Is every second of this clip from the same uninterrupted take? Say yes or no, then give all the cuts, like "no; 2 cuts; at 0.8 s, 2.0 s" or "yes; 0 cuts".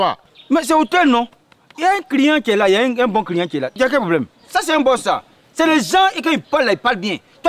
no; 1 cut; at 4.4 s